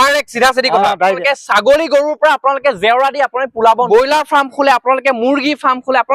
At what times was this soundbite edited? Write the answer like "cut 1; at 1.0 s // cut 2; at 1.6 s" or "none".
cut 1; at 1.2 s // cut 2; at 3.9 s